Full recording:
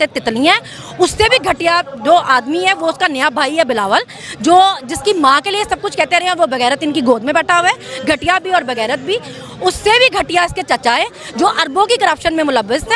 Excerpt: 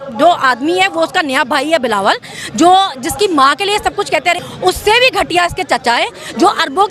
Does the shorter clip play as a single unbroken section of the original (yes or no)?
no